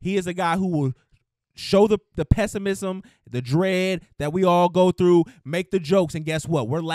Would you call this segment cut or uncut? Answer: uncut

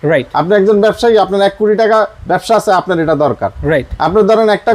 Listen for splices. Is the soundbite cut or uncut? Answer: uncut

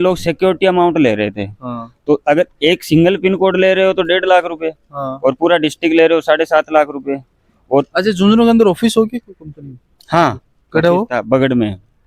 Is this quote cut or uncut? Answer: uncut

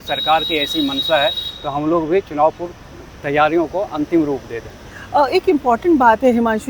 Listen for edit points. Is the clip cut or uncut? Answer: uncut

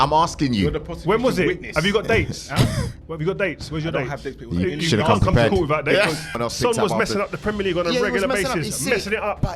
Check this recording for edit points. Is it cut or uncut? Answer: cut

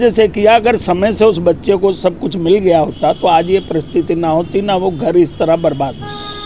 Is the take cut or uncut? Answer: uncut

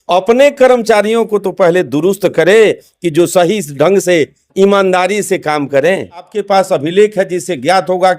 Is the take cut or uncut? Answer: cut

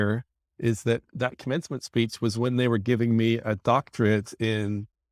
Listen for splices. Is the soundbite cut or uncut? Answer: uncut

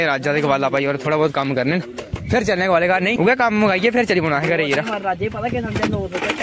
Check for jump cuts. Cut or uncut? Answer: uncut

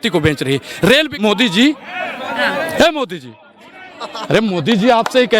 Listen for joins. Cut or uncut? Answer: cut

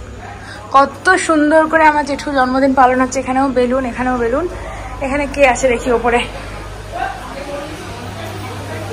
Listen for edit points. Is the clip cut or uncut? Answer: uncut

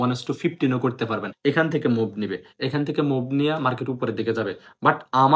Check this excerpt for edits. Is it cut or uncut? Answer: cut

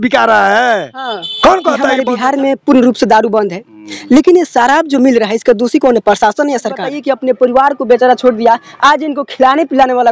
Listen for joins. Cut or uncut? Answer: cut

